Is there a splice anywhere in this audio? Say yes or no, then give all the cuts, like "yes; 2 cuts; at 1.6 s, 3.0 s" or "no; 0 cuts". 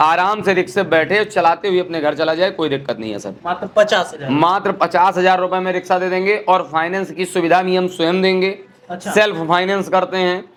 no; 0 cuts